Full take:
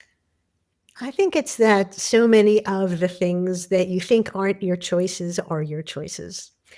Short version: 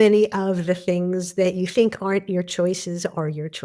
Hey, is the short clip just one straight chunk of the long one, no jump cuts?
yes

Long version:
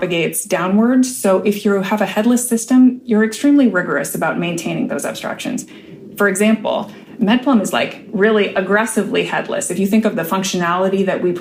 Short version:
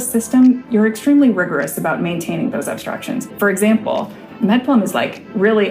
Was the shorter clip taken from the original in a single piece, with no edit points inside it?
no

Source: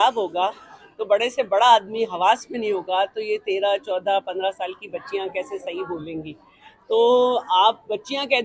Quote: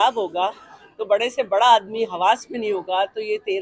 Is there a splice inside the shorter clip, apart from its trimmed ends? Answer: no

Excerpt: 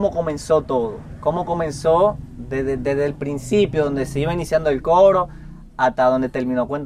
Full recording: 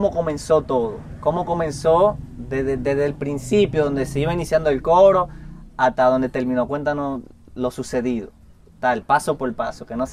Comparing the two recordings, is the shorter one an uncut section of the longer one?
yes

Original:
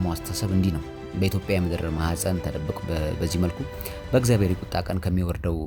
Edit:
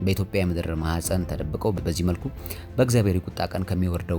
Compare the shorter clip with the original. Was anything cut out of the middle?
yes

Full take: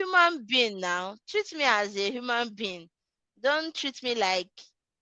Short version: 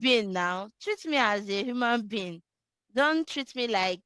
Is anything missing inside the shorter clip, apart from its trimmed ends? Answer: no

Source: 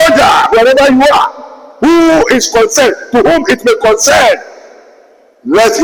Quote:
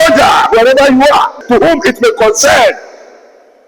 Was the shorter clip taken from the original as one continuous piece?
no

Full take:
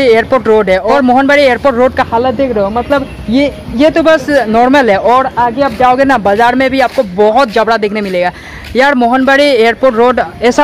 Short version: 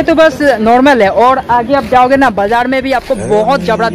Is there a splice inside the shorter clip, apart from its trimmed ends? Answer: no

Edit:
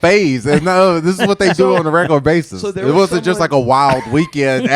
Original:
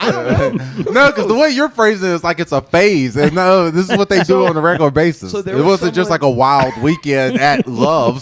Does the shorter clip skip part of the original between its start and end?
no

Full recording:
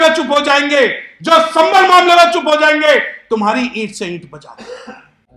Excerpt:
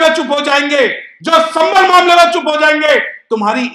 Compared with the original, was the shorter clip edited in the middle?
no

